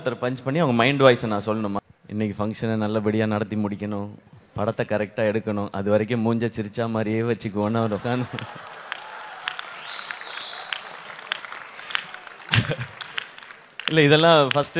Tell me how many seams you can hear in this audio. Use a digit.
1